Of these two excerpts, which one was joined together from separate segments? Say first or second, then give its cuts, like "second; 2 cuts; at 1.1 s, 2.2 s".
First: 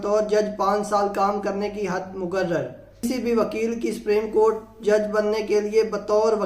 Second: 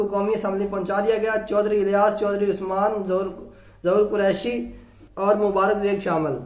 first; 1 cut; at 3.0 s